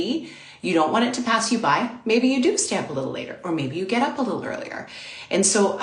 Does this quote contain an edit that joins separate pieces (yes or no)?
no